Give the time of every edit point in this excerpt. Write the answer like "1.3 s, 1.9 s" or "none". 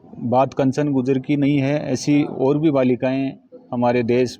none